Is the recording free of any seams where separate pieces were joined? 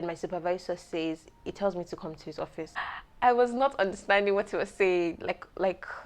no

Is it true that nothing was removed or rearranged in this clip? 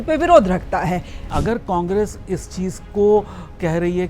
no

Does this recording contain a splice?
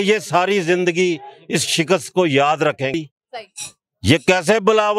yes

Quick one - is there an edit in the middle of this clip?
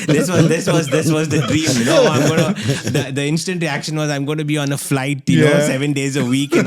no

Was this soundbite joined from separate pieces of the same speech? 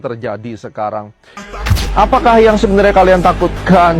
yes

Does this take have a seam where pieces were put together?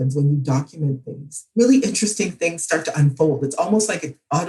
no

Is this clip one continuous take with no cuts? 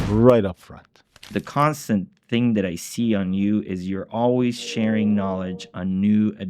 no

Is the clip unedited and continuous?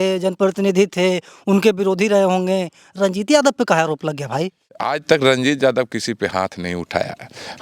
no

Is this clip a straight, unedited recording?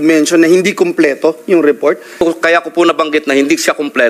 no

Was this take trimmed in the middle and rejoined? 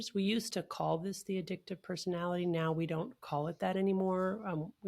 no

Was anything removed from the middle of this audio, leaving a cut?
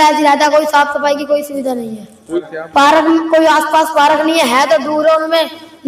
yes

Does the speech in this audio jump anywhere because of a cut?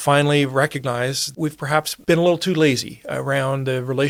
no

